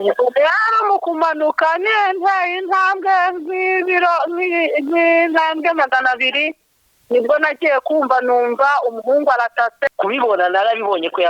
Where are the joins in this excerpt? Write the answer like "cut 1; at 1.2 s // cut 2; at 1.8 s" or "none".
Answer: cut 1; at 9.8 s